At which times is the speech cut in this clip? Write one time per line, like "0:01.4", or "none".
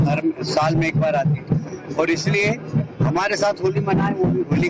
0:02.6